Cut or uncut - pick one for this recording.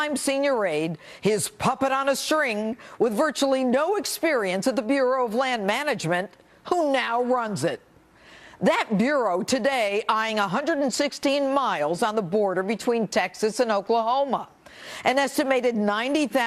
uncut